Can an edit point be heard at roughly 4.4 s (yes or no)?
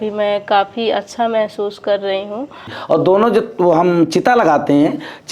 no